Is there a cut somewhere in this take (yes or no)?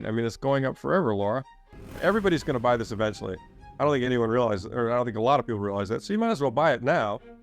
yes